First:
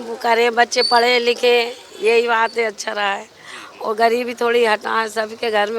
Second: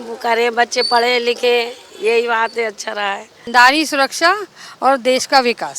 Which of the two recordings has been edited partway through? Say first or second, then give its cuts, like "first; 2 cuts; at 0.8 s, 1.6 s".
second; 1 cut; at 3.4 s